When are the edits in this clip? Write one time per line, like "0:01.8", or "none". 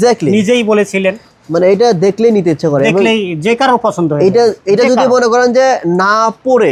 none

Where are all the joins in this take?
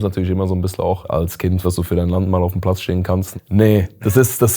0:01.6
0:03.3

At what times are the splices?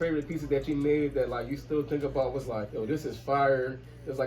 0:02.7

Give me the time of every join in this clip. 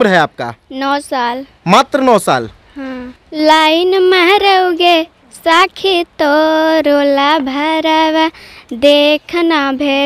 0:03.2

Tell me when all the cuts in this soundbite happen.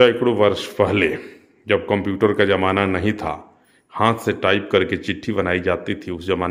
none

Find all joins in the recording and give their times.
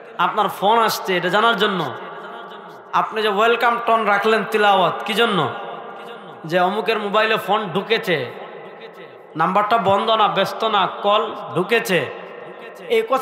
none

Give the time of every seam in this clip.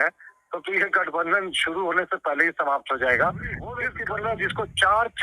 0:03.9

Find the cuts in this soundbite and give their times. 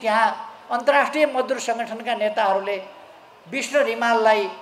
none

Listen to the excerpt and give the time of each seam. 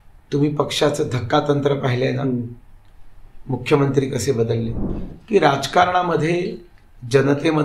0:04.8

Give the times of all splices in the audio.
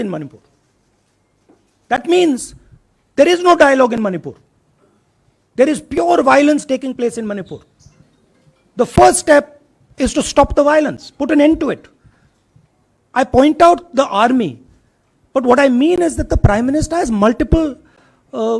none

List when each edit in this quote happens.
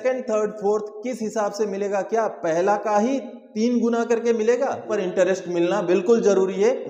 0:05.0

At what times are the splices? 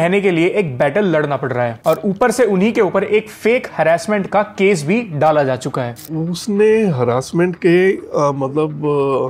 0:05.9

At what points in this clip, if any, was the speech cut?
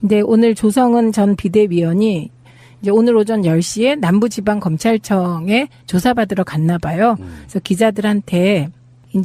0:07.9

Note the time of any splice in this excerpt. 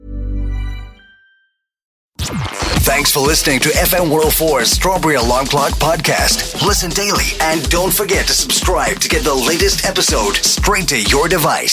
0:02.1

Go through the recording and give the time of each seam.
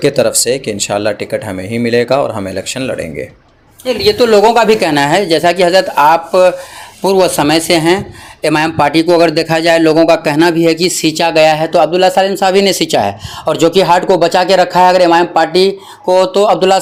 none

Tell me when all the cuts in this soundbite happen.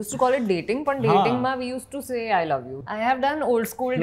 0:02.8

